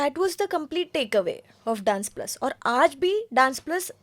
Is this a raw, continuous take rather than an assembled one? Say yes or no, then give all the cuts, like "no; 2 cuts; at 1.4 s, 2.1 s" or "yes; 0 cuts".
yes; 0 cuts